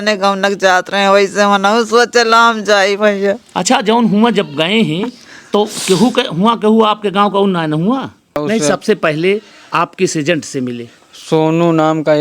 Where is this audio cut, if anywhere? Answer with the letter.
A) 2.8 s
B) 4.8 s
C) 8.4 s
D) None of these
C